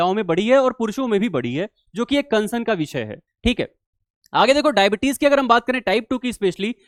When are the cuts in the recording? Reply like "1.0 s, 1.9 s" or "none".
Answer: none